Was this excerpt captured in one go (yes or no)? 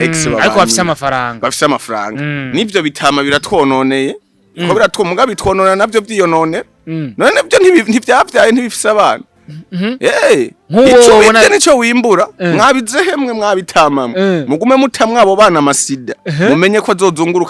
yes